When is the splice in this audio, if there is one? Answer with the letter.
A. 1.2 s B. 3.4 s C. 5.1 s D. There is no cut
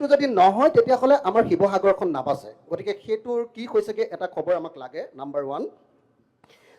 D